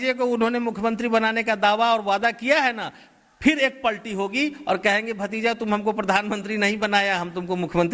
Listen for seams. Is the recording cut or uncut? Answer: uncut